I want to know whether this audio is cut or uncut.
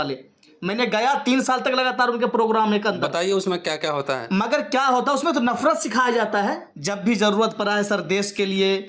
cut